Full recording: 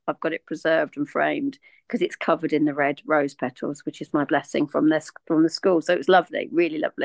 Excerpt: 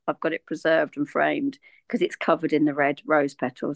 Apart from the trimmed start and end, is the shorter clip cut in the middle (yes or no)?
no